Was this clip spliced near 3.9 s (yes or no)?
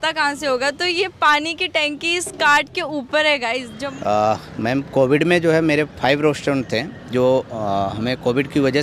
yes